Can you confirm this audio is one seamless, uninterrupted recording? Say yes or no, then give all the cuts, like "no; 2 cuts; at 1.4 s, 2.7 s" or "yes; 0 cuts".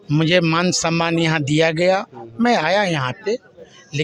yes; 0 cuts